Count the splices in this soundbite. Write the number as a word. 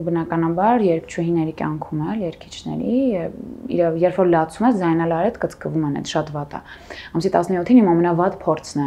zero